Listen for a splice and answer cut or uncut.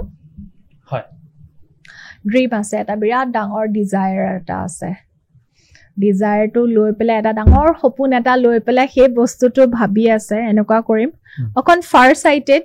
uncut